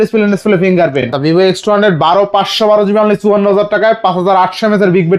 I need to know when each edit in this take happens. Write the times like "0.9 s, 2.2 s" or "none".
1.1 s